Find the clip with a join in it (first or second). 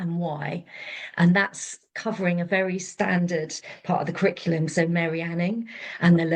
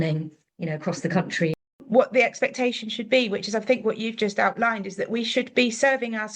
second